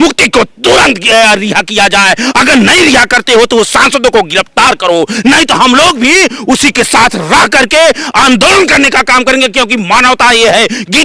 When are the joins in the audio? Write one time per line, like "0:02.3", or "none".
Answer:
none